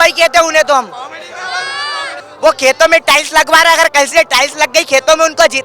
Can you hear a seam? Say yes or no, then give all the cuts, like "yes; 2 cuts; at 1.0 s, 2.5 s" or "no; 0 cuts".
yes; 1 cut; at 2.1 s